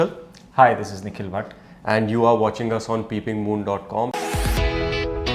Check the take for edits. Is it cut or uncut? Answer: cut